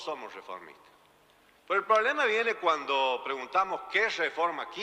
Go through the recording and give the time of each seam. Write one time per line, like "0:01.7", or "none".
none